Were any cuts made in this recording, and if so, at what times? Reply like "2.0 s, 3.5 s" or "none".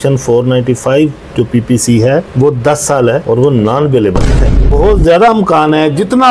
4.6 s